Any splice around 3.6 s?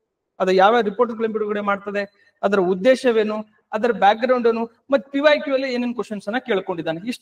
no; 0 cuts

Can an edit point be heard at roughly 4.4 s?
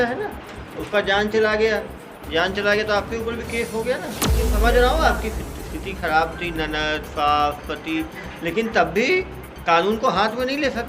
yes; 1 cut; at 4.4 s

